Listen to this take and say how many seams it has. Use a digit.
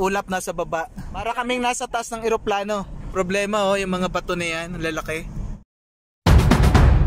3